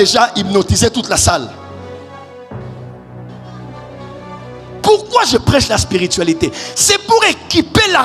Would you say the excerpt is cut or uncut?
uncut